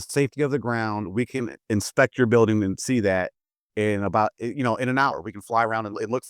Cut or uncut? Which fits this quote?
cut